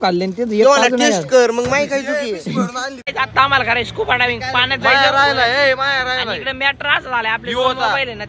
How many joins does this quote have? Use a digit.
1